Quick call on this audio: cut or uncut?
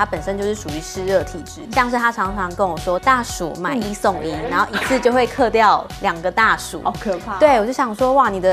cut